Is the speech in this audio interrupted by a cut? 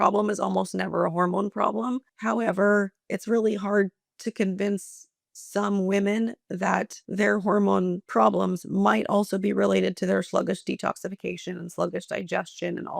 yes; 3 cuts; at 2.1 s, 7.0 s, 8.0 s

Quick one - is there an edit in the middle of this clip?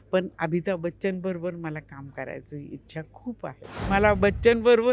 yes; 1 cut; at 3.9 s

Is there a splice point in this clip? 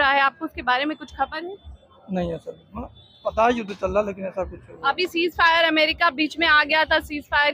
no; 0 cuts

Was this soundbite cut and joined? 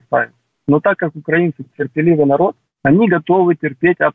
yes; 1 cut; at 2.7 s

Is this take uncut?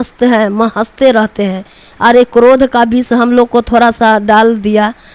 yes; 0 cuts

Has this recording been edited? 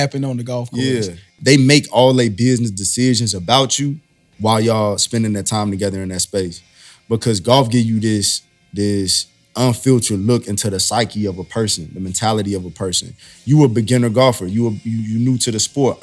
yes; 1 cut; at 1.3 s

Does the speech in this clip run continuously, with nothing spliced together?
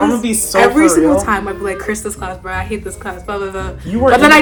yes; 0 cuts

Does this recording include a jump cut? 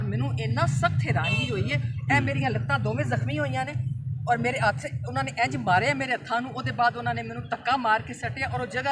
no; 0 cuts

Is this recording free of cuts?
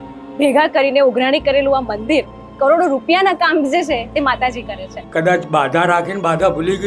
no; 2 cuts; at 2.4 s, 5.0 s

